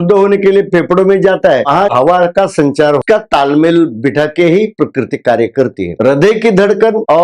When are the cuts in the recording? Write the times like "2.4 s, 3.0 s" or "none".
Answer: 1.7 s, 3.0 s, 5.9 s